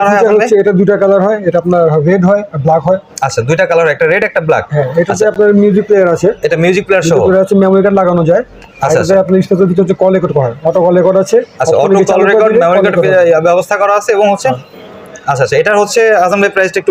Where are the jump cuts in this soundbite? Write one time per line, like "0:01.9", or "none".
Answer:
none